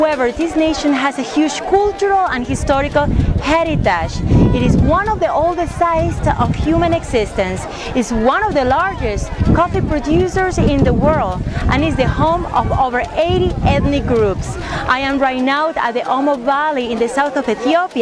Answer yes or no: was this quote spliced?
no